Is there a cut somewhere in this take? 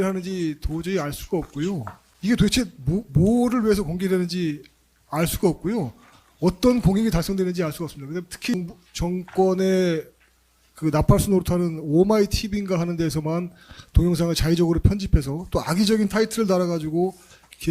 yes; 2 cuts; at 1.9 s, 8.5 s

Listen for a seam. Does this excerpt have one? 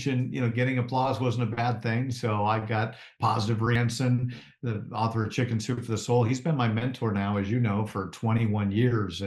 yes; 1 cut; at 3.8 s

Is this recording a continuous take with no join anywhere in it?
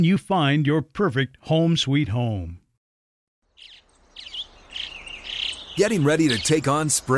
no; 1 cut; at 3.4 s

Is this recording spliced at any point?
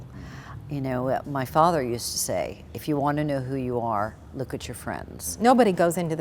yes; 1 cut; at 5.3 s

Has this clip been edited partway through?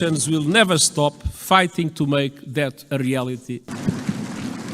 yes; 1 cut; at 3.7 s

